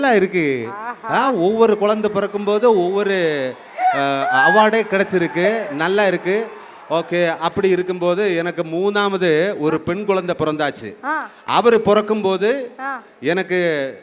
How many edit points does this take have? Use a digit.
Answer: 0